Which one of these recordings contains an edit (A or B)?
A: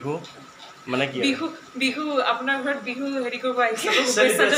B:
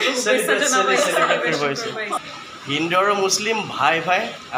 B